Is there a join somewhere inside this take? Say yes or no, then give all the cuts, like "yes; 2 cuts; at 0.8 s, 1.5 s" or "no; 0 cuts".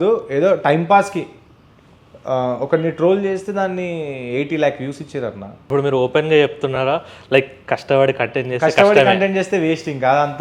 yes; 1 cut; at 5.5 s